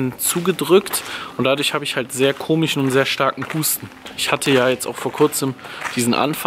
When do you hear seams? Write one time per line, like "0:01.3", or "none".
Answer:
0:04.1